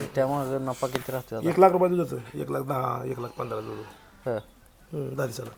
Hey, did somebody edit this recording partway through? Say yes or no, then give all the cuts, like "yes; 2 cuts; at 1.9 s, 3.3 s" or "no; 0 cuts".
no; 0 cuts